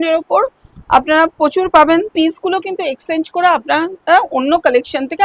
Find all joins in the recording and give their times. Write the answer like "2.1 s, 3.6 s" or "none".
2.1 s